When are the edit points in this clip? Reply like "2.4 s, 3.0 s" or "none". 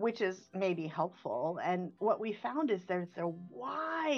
none

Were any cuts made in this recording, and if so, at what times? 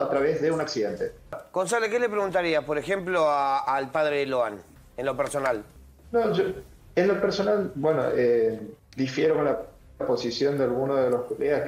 1.4 s

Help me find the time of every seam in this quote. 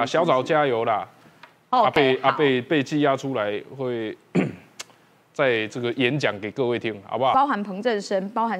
7.3 s

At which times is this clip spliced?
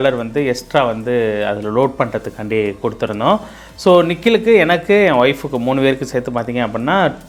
none

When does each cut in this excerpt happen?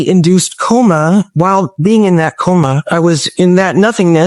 1.3 s, 3.1 s

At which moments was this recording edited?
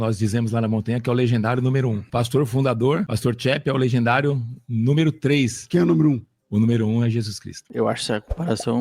2.0 s, 3.1 s, 5.6 s, 7.6 s

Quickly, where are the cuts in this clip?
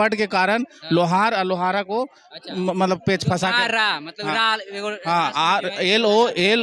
none

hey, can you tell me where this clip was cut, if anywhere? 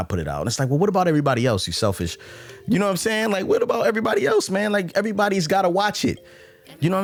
none

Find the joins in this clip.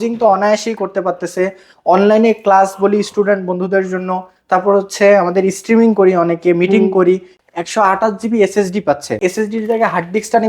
7.4 s, 9.2 s

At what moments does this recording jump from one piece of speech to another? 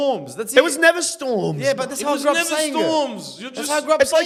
none

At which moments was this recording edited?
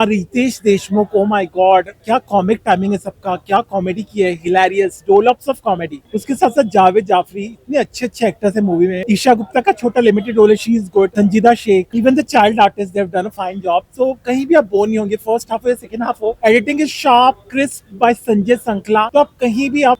none

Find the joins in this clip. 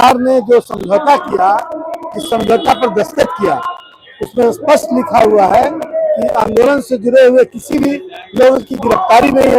none

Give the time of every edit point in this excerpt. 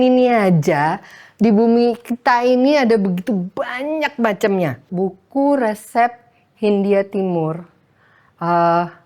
4.9 s

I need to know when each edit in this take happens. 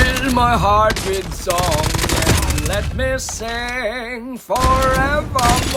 none

